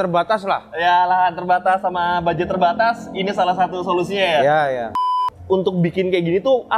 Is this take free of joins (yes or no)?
no